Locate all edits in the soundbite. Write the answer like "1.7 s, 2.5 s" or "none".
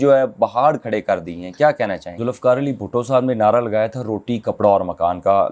2.1 s